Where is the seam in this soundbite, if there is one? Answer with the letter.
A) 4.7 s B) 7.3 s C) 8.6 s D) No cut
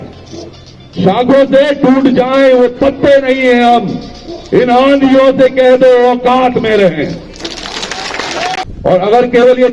C